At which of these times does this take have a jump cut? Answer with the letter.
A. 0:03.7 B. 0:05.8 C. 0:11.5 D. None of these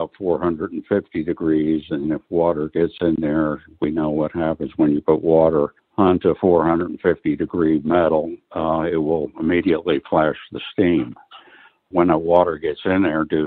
B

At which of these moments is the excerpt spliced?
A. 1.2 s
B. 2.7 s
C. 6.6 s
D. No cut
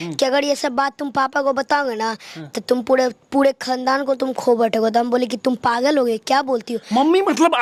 D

